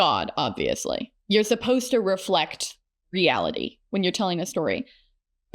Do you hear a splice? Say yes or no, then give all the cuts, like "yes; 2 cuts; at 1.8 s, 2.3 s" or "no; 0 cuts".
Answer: yes; 1 cut; at 1.1 s